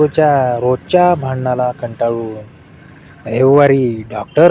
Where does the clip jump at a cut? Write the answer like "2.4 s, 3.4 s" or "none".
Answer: none